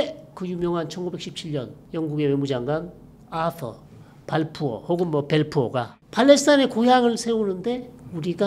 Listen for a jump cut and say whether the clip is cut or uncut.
cut